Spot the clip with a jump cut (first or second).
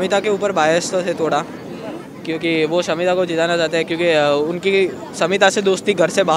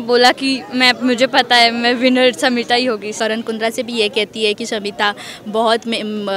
second